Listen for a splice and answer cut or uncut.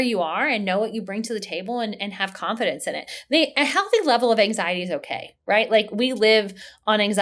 uncut